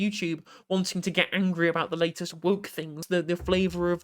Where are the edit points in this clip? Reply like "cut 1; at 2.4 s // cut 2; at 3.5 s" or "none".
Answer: cut 1; at 3.0 s